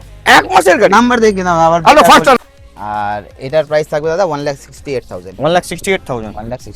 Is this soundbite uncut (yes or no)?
no